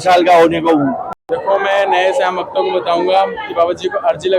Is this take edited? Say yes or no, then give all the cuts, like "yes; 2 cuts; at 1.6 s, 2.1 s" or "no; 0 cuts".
yes; 1 cut; at 1.1 s